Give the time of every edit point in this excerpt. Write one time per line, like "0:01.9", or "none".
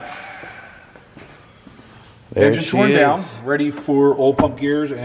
none